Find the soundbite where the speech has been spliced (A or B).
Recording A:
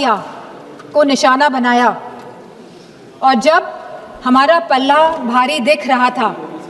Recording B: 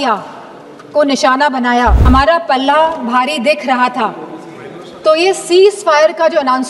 B